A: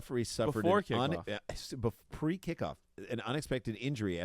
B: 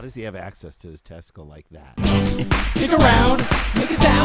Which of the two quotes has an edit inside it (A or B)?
B